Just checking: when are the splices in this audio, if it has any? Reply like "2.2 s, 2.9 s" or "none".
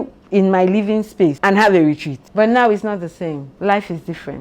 1.4 s